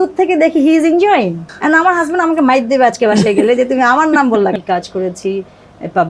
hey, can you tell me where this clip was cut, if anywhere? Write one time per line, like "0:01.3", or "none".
0:01.5
0:04.6